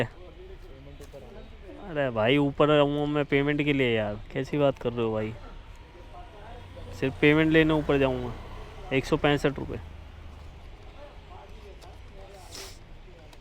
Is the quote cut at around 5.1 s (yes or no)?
no